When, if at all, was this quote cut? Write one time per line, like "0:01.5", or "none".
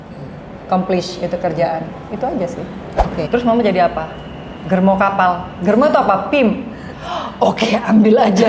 0:03.3

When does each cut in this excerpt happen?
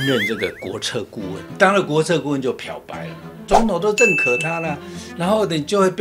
0:01.4
0:03.5

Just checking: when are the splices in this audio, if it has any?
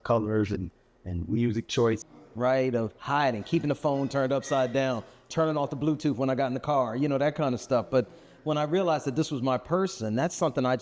0:02.0

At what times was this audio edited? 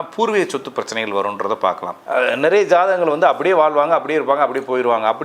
0:01.9

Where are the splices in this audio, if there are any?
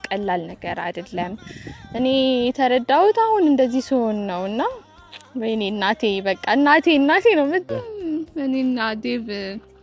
0:07.7

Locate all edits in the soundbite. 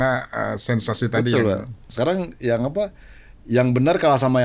none

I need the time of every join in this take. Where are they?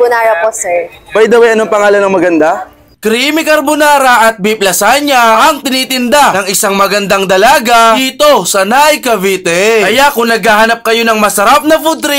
0:02.8

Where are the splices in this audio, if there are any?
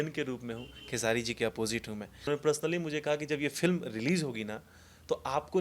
0:02.3

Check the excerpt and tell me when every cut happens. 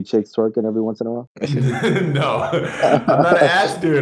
0:01.3

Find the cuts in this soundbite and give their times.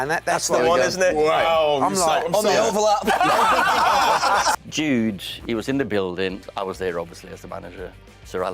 0:04.6
0:06.4

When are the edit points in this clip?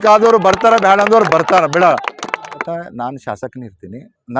0:02.6

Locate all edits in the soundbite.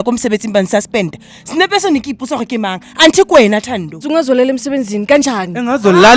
0:04.0

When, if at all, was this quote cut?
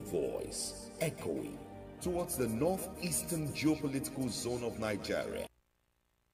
0:05.4

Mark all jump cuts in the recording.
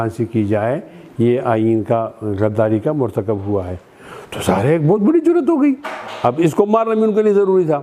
none

